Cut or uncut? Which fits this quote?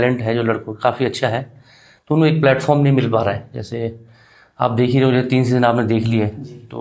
uncut